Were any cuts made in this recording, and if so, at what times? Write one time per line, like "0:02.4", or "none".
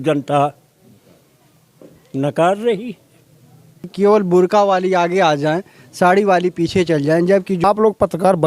0:03.9
0:07.6